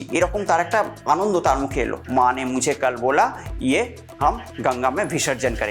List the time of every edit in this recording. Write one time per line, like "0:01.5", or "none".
0:02.0